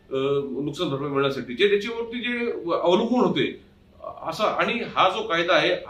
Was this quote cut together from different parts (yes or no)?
no